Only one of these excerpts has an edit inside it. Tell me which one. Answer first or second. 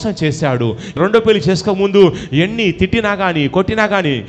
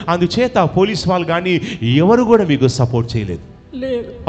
first